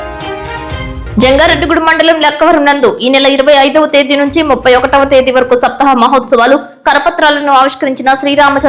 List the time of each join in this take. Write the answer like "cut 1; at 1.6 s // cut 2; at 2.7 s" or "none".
cut 1; at 1.0 s